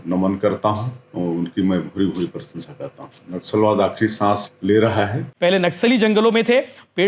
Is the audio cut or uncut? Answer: cut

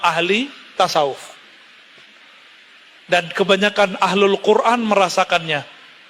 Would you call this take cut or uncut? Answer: uncut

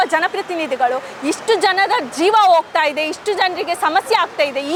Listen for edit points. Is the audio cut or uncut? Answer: uncut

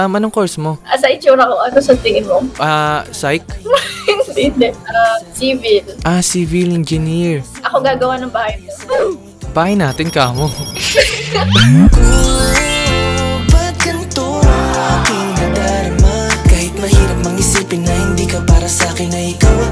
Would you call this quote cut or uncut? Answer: uncut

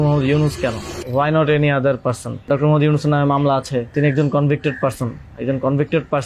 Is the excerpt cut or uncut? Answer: cut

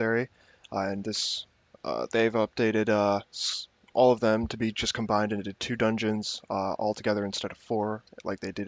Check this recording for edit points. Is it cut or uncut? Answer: cut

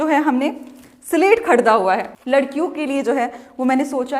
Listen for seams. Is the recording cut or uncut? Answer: cut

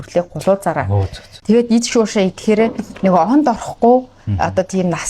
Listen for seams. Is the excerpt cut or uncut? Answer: cut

